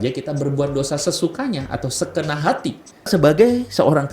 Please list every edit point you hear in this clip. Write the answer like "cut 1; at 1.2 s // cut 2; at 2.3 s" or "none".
cut 1; at 3.1 s